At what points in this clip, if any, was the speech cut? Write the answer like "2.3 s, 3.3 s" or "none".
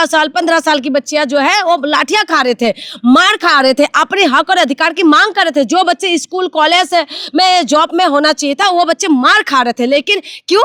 none